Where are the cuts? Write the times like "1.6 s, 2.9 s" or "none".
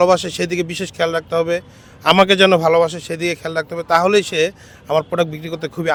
none